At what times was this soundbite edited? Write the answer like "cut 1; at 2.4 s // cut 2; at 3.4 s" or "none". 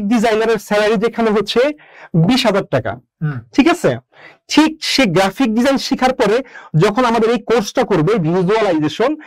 none